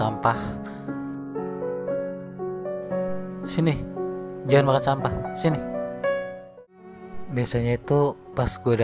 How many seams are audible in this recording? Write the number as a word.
one